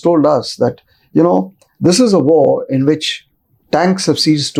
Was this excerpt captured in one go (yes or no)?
yes